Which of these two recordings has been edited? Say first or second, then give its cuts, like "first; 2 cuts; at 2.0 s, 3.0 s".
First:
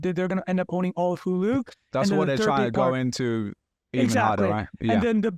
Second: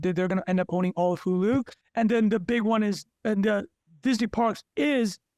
second; 1 cut; at 1.8 s